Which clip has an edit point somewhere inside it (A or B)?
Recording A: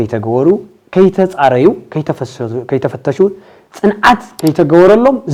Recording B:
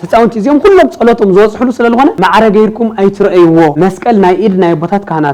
B